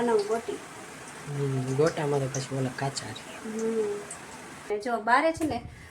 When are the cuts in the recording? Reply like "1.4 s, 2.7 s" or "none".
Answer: 4.7 s